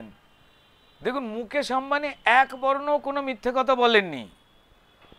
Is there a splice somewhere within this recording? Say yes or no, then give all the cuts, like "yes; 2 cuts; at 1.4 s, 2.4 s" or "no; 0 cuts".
no; 0 cuts